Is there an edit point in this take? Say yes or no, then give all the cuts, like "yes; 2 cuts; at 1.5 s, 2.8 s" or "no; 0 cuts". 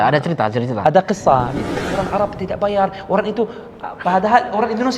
yes; 1 cut; at 1.6 s